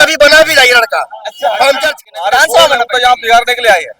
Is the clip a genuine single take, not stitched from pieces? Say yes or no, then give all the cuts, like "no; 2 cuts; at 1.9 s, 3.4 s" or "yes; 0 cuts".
no; 1 cut; at 2.0 s